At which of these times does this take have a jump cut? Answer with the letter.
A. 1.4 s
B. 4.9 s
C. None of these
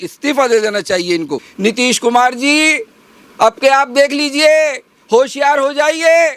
A